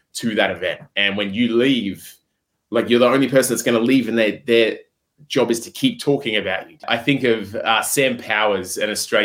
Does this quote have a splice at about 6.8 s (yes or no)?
yes